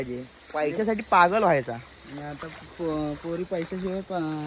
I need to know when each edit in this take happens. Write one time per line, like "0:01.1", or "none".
none

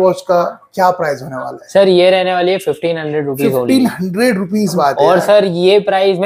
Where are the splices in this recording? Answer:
0:04.8

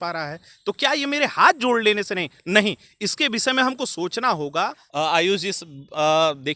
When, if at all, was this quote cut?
0:04.8

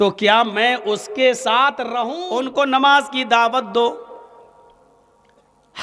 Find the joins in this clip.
0:02.2

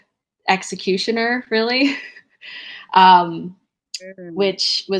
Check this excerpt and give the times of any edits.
none

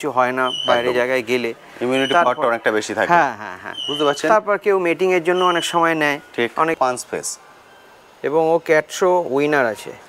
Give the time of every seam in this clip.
0:06.7

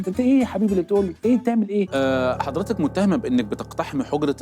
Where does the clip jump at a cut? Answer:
0:01.9

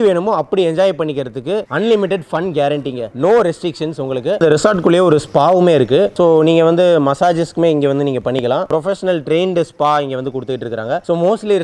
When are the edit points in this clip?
none

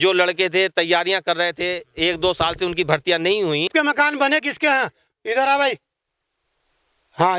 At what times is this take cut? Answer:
0:03.7

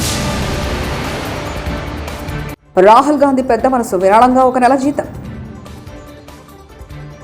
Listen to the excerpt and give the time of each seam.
0:02.6

